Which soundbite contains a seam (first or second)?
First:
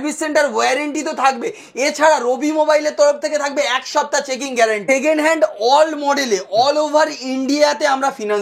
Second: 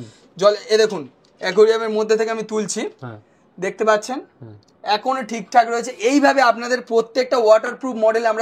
first